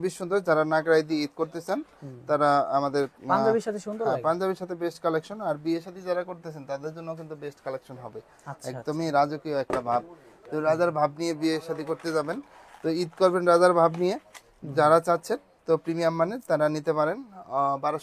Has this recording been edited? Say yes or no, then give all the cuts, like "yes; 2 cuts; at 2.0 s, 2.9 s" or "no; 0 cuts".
no; 0 cuts